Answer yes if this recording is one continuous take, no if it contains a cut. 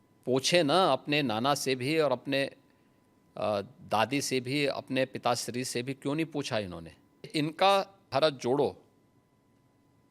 no